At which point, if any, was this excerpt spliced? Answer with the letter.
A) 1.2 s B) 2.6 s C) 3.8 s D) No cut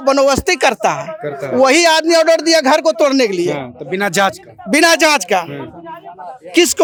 D